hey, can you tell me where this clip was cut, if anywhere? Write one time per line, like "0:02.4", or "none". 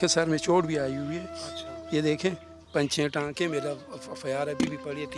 none